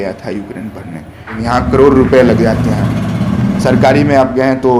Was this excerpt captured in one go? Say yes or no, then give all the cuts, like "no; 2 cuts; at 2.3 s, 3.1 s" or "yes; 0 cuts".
no; 1 cut; at 1.4 s